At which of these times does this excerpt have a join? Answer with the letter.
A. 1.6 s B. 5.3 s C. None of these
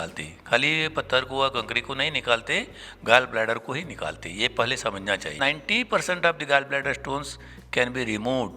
B